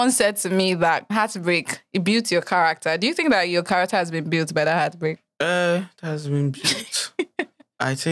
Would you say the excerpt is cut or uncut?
cut